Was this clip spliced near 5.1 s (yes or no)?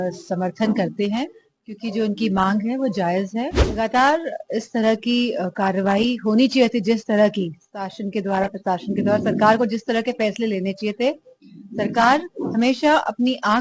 no